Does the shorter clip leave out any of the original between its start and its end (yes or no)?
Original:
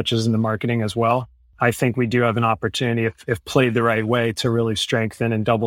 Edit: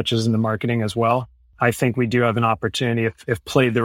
no